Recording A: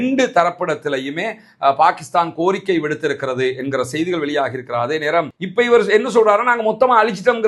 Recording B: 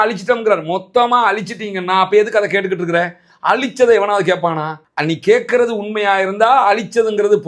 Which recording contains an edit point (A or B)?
A